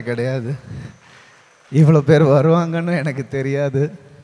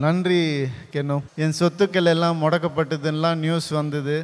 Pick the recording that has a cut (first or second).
second